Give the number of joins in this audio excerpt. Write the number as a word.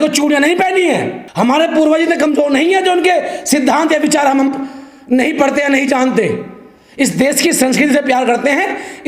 one